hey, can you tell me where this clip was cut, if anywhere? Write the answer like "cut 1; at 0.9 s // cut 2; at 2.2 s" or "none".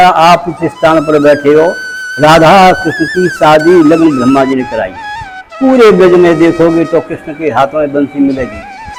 none